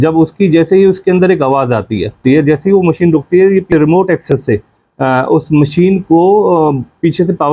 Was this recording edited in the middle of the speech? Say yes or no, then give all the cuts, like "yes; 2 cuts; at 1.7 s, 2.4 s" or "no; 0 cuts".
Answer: yes; 2 cuts; at 2.2 s, 3.7 s